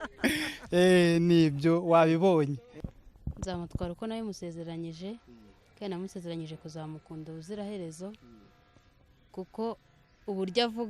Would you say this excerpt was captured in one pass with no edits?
no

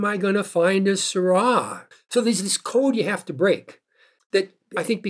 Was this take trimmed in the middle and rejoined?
no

